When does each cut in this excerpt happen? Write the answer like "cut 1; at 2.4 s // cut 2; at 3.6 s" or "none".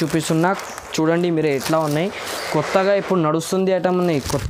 none